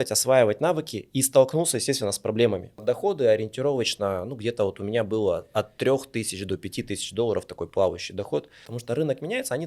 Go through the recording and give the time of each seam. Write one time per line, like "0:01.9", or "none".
0:02.8
0:08.7